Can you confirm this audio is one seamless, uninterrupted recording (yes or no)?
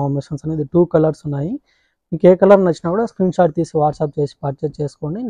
yes